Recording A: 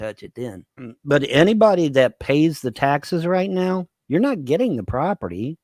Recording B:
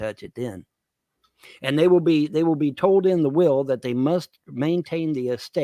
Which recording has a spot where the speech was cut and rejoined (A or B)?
A